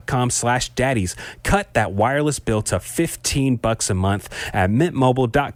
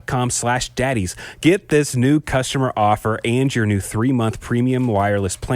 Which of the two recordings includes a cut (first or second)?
second